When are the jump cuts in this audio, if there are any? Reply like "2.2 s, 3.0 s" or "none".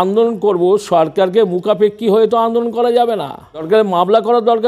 3.7 s